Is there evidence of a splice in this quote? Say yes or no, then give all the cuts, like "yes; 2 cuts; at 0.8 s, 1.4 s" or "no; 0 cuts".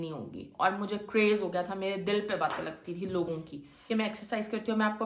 yes; 1 cut; at 3.9 s